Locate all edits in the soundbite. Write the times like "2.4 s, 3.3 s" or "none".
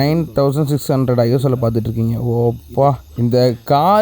3.1 s